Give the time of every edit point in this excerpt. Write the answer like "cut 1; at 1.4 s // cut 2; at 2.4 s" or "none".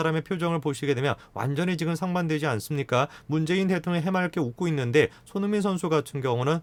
none